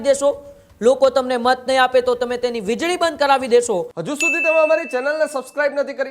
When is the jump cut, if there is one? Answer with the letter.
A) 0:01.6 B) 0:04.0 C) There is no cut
B